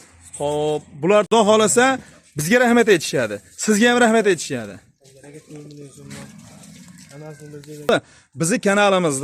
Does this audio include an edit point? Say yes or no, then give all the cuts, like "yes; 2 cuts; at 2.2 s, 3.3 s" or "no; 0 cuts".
yes; 2 cuts; at 1.3 s, 7.9 s